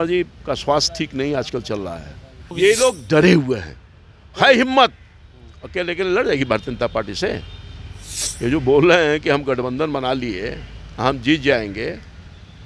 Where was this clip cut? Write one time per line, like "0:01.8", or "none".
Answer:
0:02.5